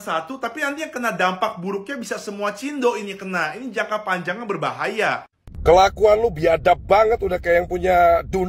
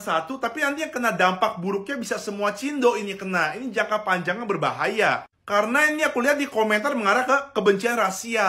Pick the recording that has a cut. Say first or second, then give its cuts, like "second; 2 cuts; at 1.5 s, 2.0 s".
first; 1 cut; at 5.4 s